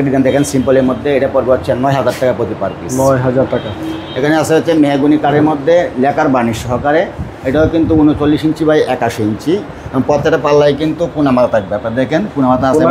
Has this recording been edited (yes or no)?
no